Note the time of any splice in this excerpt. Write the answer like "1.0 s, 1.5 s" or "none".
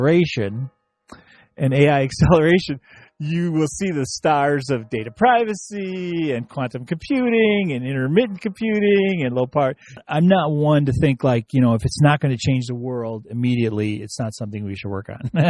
10.0 s